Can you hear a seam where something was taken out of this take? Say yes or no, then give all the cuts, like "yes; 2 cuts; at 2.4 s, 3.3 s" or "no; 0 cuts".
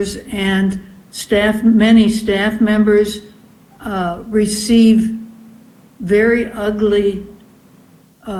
no; 0 cuts